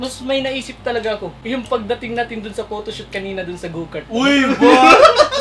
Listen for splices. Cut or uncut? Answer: cut